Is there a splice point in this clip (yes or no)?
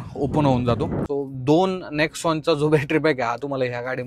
yes